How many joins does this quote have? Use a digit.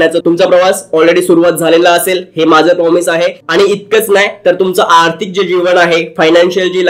0